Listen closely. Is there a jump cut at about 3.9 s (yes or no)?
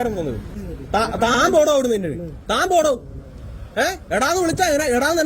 no